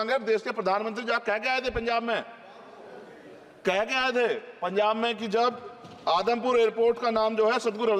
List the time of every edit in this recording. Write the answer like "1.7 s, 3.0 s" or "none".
none